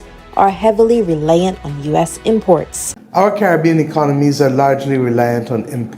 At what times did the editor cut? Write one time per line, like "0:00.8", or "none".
0:03.0